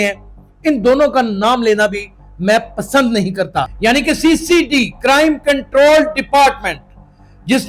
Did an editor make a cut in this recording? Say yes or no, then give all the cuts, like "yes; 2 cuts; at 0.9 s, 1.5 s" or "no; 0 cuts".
yes; 1 cut; at 3.7 s